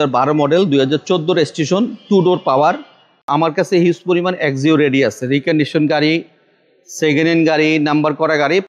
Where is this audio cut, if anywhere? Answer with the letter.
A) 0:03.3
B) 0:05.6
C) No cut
A